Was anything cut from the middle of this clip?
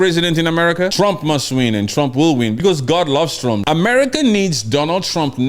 yes; 3 cuts; at 0.9 s, 2.6 s, 3.6 s

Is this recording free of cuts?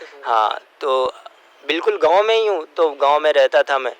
yes; 0 cuts

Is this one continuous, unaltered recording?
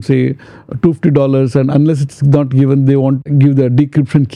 no; 1 cut; at 3.3 s

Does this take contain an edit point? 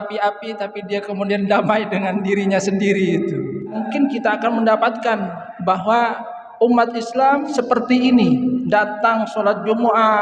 yes; 2 cuts; at 3.8 s, 7.5 s

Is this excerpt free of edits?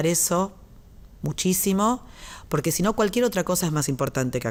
yes; 0 cuts

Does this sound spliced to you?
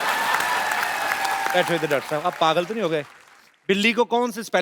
yes; 1 cut; at 1.5 s

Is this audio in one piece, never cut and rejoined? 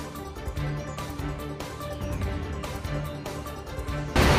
yes; 0 cuts

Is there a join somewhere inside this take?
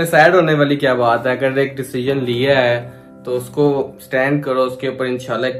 no; 0 cuts

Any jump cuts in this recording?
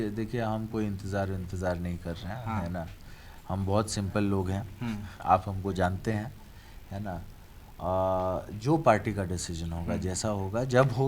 no; 0 cuts

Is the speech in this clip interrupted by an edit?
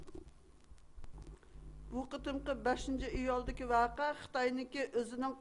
no; 0 cuts

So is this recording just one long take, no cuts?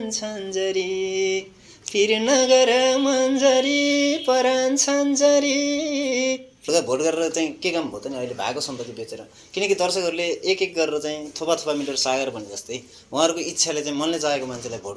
no; 1 cut; at 6.7 s

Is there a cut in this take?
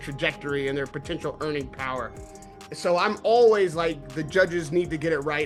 no; 0 cuts

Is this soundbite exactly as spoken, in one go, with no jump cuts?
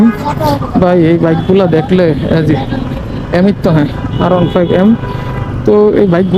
yes; 0 cuts

